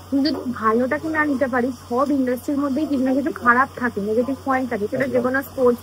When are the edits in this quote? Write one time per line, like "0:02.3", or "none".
none